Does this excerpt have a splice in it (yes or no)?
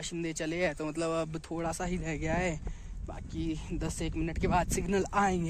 no